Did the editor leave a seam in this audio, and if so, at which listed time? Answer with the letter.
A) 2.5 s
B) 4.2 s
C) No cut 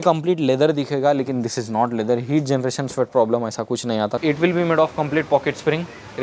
B